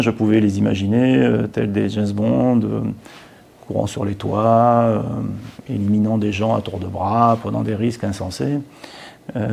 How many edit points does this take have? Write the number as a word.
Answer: zero